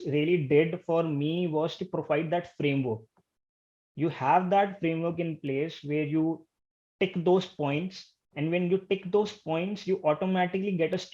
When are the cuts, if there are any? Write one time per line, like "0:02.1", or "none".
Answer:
none